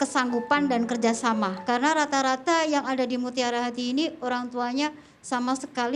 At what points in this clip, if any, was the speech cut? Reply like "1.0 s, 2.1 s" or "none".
1.6 s